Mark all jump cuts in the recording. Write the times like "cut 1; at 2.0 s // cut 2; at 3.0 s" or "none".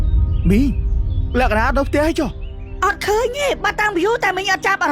none